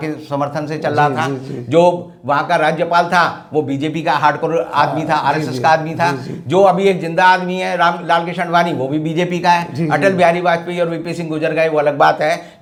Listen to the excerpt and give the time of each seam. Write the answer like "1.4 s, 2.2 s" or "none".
none

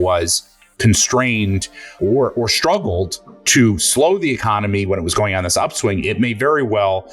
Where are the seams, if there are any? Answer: 2.0 s

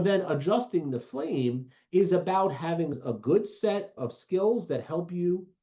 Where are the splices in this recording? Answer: 3.9 s

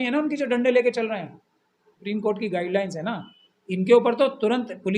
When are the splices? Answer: 2.0 s

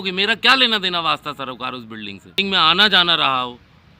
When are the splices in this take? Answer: 2.3 s

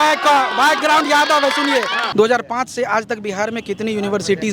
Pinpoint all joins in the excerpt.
2.0 s

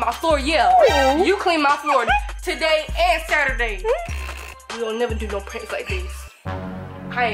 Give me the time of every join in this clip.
4.6 s

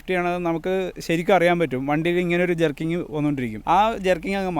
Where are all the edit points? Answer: 3.5 s

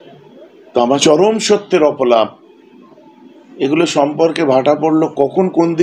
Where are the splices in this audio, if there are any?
1.0 s

